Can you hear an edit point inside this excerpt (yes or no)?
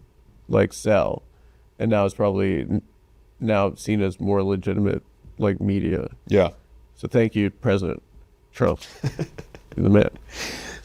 no